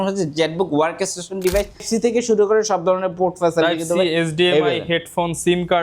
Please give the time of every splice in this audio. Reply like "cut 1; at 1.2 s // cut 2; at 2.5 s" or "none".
cut 1; at 1.8 s